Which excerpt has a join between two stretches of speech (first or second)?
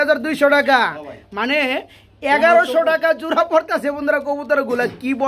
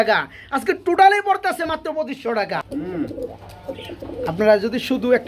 second